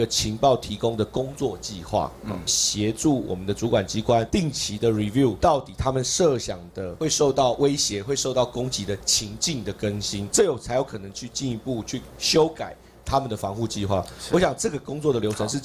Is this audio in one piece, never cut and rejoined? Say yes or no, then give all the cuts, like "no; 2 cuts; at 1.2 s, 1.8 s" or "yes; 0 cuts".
yes; 0 cuts